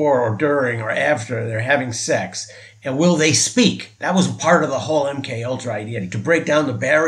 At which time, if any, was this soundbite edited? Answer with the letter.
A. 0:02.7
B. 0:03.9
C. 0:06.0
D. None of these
C